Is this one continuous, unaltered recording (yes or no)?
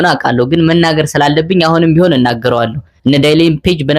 no